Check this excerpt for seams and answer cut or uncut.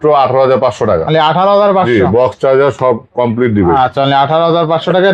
uncut